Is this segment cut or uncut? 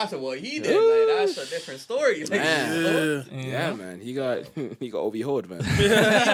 uncut